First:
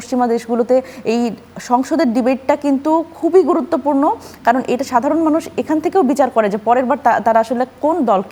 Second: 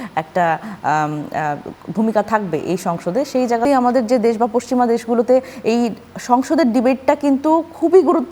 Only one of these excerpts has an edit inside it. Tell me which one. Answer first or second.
second